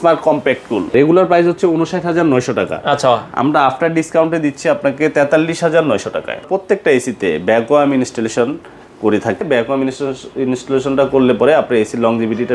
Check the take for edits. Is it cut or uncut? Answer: cut